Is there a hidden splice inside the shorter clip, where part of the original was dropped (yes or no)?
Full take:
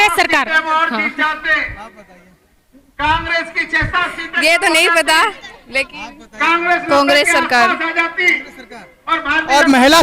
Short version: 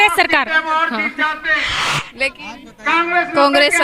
yes